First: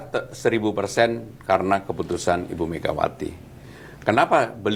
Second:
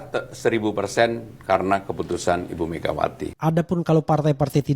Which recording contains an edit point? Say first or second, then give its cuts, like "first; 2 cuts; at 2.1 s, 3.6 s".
second; 1 cut; at 3.3 s